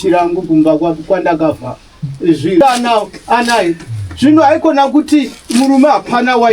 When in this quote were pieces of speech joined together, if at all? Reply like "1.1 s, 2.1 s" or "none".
2.6 s